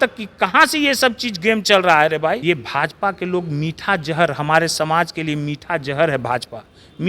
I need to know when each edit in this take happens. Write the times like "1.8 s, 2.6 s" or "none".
2.4 s